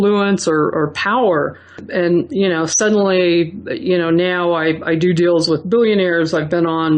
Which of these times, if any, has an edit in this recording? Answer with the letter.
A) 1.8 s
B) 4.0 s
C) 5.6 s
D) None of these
A